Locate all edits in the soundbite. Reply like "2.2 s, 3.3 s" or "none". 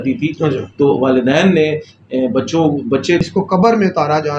3.2 s